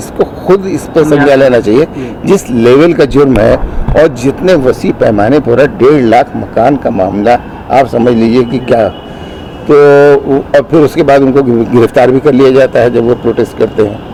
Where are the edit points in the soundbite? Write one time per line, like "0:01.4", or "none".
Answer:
none